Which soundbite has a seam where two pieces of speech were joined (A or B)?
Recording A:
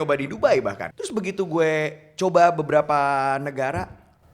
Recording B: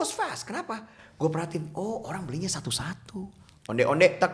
A